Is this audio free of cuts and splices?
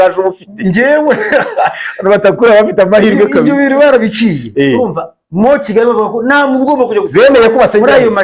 yes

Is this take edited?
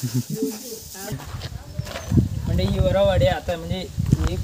yes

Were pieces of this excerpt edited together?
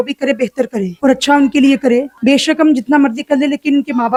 no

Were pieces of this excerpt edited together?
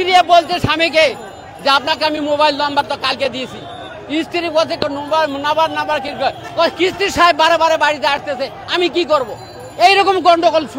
no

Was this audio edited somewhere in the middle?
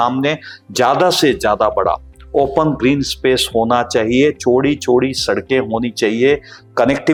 no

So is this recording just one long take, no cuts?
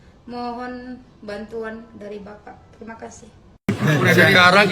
no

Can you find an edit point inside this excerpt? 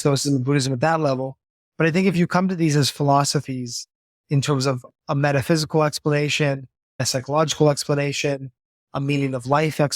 yes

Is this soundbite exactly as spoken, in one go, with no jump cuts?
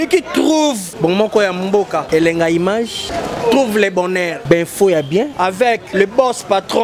yes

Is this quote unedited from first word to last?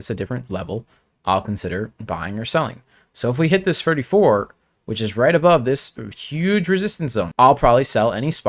no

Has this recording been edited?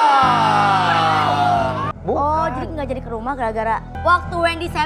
yes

